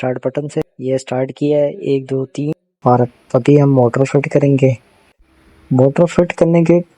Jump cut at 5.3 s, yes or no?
no